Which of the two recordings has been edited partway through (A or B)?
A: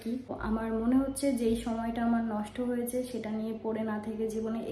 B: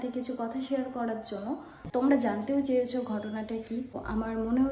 B